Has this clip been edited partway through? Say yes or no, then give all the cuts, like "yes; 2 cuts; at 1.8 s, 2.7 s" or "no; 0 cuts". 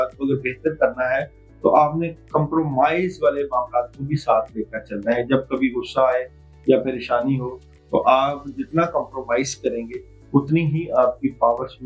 no; 0 cuts